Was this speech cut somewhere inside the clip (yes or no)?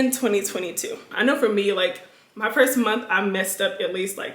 yes